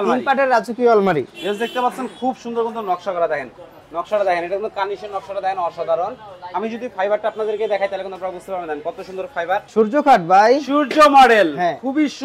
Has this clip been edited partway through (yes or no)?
yes